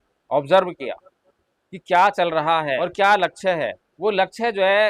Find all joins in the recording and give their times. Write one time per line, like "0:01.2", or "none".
0:02.8
0:03.8